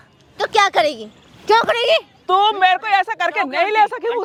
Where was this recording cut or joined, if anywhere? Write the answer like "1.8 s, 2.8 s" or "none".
none